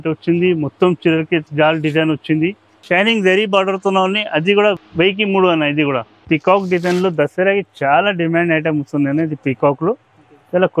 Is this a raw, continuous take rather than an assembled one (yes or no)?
no